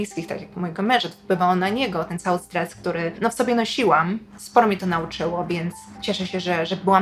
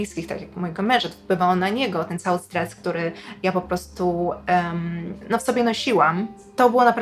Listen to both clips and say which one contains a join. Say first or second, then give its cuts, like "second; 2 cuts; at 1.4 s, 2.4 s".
first; 3 cuts; at 3.1 s, 4.3 s, 5.9 s